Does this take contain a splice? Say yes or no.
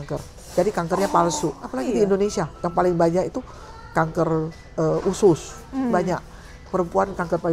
yes